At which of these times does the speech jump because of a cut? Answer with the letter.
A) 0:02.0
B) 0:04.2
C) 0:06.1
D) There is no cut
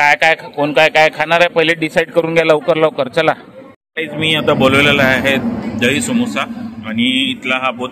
D